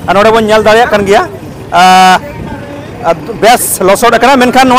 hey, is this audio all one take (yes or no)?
yes